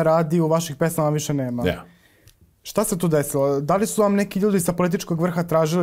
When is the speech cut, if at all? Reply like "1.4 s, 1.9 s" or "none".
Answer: none